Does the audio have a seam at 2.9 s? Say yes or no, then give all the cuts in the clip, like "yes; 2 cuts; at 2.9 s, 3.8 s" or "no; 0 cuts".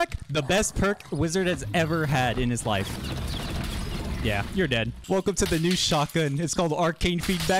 yes; 2 cuts; at 2.9 s, 5.0 s